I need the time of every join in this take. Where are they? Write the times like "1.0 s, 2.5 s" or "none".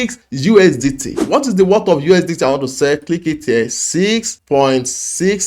1.2 s